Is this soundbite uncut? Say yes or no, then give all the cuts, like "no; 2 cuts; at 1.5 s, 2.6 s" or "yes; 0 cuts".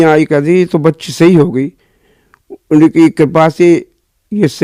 yes; 0 cuts